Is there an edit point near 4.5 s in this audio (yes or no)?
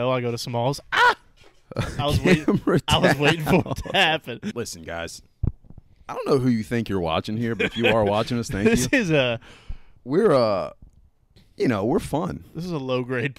yes